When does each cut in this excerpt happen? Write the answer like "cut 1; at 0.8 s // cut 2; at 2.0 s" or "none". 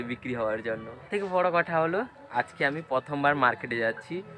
cut 1; at 1.2 s